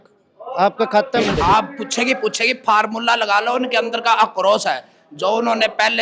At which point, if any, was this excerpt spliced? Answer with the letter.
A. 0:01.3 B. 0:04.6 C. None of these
A